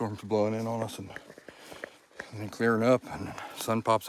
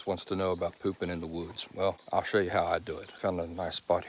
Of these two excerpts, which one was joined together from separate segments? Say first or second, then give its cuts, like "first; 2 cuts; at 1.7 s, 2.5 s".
second; 2 cuts; at 2.0 s, 3.1 s